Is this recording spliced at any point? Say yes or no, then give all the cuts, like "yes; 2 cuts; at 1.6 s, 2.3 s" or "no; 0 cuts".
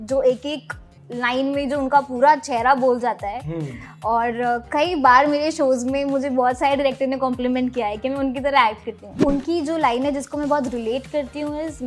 yes; 1 cut; at 9.2 s